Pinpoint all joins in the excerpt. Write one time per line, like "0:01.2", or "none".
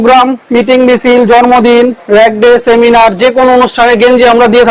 none